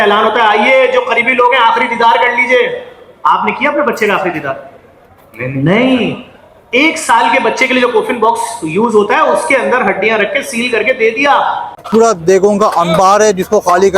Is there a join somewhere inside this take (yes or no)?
yes